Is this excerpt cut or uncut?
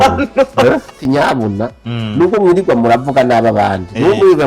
cut